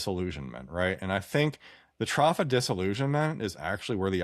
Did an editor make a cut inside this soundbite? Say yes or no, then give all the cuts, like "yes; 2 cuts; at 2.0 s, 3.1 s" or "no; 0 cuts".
no; 0 cuts